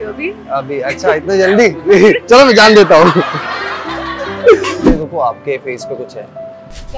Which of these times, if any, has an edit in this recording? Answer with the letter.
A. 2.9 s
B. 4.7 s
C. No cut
B